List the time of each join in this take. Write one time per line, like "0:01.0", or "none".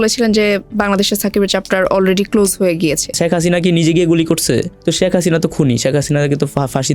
0:03.1
0:04.7